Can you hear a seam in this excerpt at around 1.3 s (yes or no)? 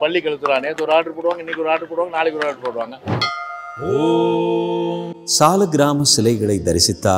no